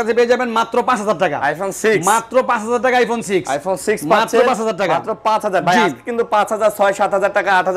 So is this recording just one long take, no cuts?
yes; 0 cuts

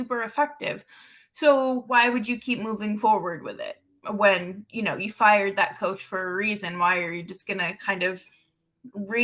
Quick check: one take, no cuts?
no; 1 cut; at 1.8 s

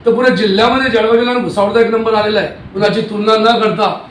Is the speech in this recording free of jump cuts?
no; 1 cut; at 2.6 s

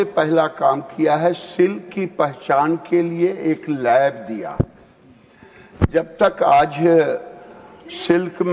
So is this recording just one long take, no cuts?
yes; 0 cuts

